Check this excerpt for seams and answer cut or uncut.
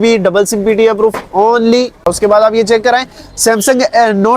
cut